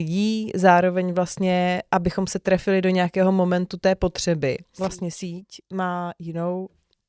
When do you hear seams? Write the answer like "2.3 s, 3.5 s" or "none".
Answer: 4.7 s